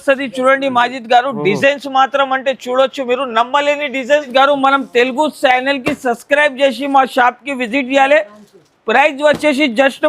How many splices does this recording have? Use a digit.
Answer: 1